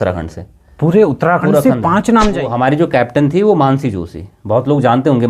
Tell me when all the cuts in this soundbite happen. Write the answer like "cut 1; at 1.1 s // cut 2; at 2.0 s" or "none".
cut 1; at 2.4 s